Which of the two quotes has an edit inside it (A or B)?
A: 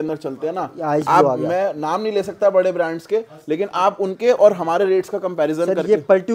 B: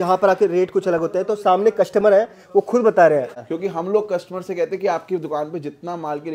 B